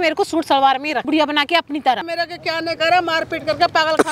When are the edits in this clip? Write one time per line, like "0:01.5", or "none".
0:01.1
0:02.1